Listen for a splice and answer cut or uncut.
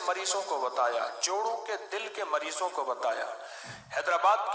uncut